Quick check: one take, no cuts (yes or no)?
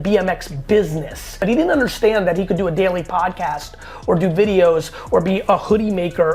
yes